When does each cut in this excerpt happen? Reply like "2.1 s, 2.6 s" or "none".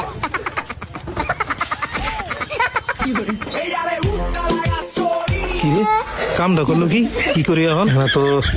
none

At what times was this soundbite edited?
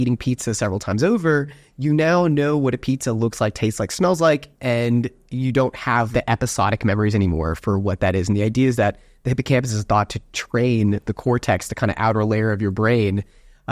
4.5 s, 6.1 s

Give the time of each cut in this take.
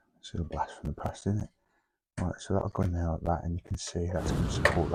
none

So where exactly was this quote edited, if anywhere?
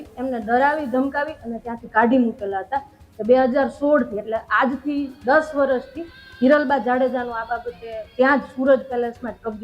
none

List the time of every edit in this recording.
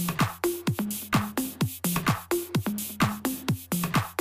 3.2 s

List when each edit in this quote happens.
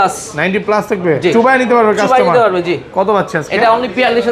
none

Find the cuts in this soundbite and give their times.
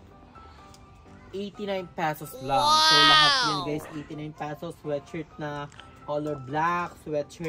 none

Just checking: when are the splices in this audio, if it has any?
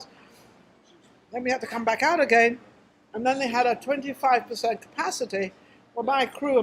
4.1 s

